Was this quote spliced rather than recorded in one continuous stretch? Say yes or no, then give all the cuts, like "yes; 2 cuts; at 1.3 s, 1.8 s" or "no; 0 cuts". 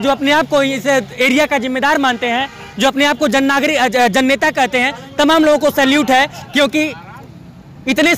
no; 0 cuts